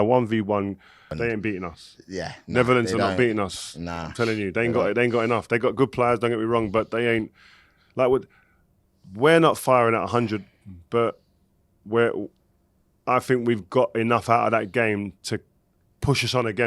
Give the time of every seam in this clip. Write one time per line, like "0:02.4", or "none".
0:01.1